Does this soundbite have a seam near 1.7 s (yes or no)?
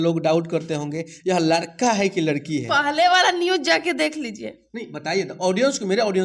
no